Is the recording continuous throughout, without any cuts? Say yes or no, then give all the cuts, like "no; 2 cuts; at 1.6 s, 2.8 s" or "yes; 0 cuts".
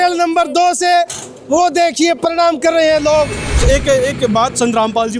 no; 1 cut; at 3.5 s